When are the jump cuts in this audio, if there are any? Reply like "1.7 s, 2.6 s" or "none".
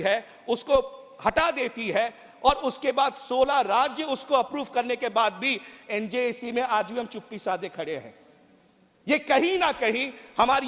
none